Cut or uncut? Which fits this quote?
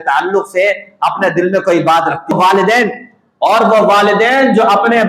cut